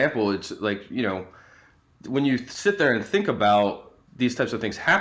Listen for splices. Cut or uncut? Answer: cut